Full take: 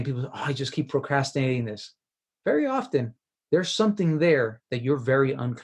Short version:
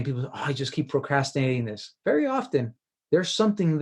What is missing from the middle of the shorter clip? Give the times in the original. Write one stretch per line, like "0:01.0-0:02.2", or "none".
0:01.8-0:02.2